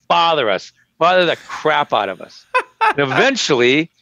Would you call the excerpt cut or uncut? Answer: uncut